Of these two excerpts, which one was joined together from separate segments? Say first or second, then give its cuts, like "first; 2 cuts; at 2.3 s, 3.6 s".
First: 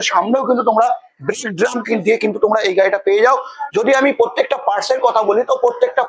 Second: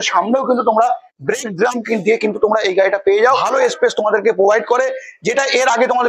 second; 1 cut; at 3.4 s